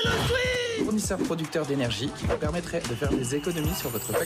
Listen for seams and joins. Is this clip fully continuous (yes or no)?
yes